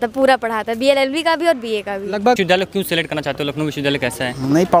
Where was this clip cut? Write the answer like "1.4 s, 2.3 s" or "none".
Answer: 2.4 s